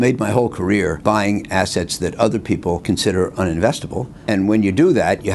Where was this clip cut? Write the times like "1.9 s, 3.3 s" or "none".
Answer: 1.0 s, 2.8 s, 4.1 s